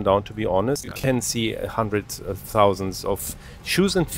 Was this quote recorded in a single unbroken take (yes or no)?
no